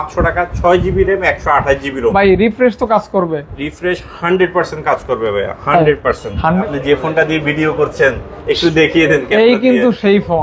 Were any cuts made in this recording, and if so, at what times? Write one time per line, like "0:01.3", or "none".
0:06.6